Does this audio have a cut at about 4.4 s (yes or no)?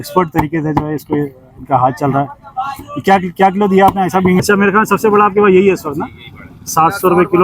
yes